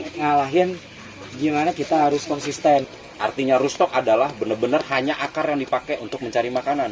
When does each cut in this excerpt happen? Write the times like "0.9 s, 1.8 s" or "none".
3.0 s